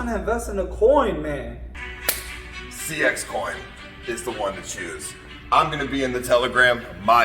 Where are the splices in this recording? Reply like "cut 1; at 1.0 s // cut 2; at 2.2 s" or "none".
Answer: cut 1; at 1.7 s